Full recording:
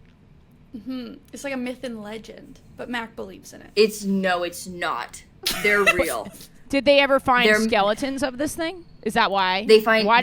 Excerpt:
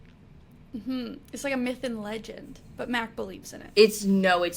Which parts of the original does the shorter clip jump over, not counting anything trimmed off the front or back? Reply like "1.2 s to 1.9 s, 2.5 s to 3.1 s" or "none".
none

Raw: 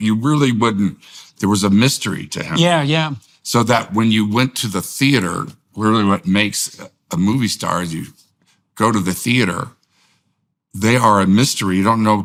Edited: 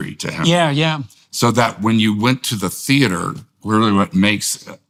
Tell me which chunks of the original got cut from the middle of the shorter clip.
none

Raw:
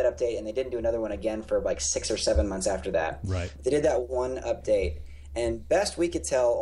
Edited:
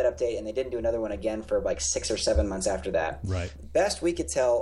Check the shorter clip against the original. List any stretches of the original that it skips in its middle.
3.6 s to 5.6 s

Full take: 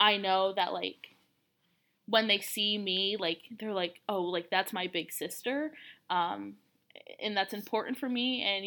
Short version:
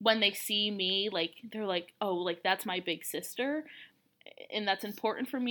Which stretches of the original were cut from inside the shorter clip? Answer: 5.9 s to 6.5 s

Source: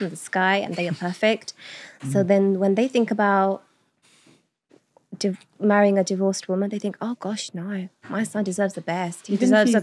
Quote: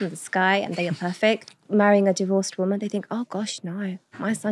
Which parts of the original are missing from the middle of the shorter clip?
1.6 s to 5.5 s

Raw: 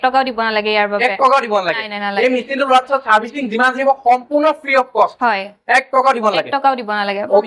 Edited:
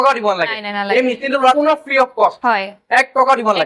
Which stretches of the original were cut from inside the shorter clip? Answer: 2.8 s to 4.3 s

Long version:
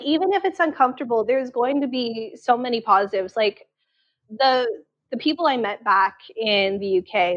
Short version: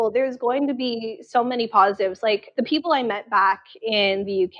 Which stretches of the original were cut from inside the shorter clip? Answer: 3.6 s to 5.0 s

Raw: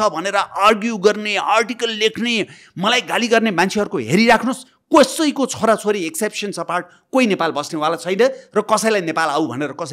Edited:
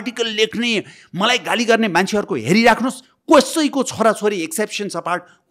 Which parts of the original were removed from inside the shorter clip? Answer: none

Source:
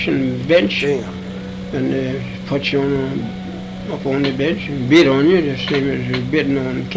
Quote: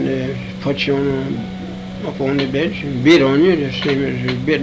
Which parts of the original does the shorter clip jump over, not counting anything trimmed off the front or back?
none

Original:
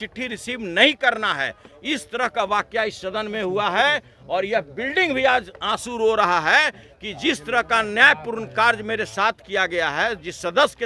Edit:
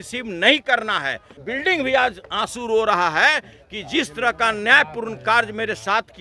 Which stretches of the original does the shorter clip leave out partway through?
1.7 s to 4.7 s

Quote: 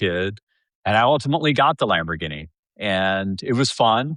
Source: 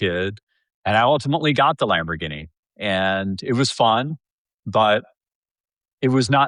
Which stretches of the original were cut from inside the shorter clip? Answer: none

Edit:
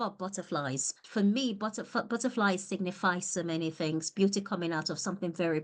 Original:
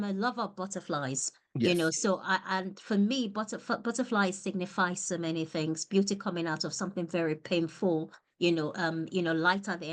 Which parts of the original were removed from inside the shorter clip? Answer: 1.4 s to 2.7 s

